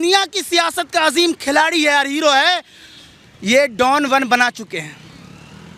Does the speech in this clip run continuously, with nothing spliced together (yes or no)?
yes